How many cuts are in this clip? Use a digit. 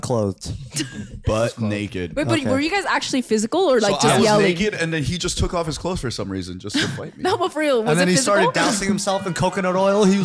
0